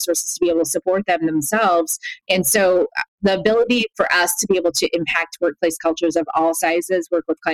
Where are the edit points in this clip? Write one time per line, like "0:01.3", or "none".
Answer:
0:02.1